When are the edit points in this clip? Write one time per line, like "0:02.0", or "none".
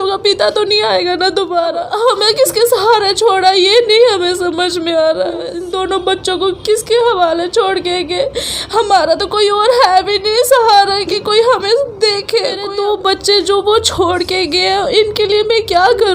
0:01.8
0:05.6
0:12.7